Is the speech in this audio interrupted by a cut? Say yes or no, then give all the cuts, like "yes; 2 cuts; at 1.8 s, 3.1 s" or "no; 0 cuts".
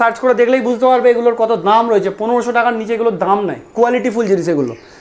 no; 0 cuts